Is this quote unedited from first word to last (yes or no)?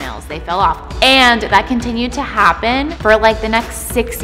no